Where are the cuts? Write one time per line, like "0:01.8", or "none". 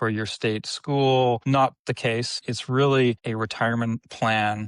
0:01.4
0:02.4
0:03.2